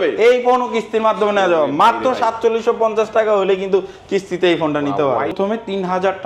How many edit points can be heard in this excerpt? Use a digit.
1